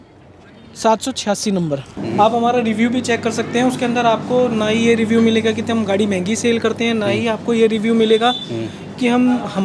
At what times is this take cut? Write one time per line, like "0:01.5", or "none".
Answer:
0:02.0